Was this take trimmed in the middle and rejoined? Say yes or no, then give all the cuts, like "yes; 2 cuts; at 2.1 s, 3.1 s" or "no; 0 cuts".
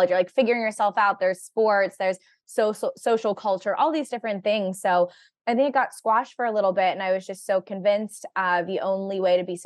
no; 0 cuts